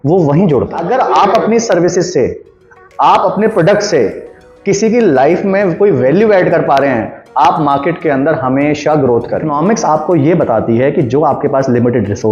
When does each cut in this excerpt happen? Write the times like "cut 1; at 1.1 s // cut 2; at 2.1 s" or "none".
cut 1; at 0.9 s // cut 2; at 9.5 s